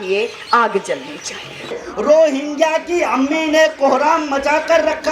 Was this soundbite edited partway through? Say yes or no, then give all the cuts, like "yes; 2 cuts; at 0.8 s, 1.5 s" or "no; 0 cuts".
yes; 1 cut; at 1.8 s